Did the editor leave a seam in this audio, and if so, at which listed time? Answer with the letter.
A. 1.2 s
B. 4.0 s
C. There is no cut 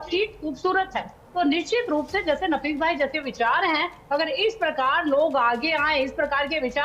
A